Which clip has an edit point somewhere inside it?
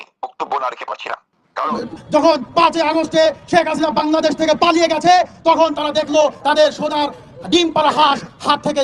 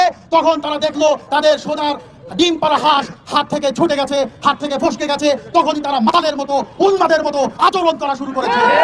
first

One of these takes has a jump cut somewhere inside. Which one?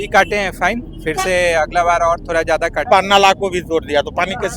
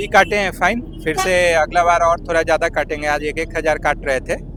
first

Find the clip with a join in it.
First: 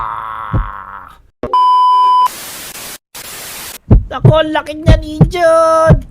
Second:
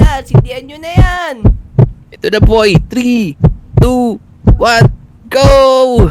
first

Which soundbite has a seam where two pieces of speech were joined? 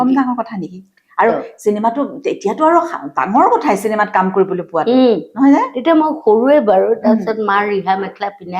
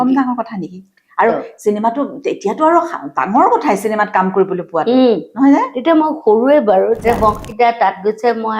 second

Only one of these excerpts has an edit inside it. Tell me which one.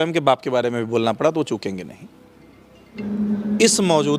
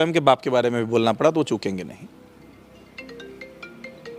first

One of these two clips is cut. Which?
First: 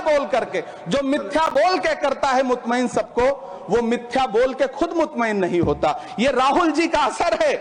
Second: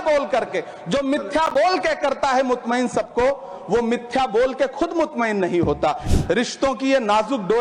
second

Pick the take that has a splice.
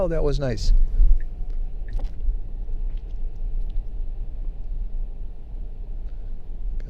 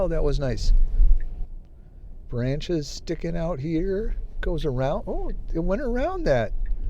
second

